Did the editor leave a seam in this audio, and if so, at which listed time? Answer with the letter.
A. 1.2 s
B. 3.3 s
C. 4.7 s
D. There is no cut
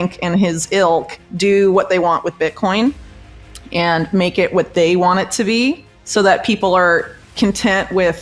A